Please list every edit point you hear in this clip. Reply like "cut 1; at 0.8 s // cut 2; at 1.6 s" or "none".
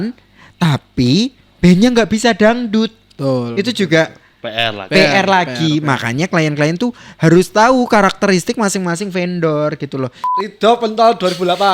cut 1; at 10.2 s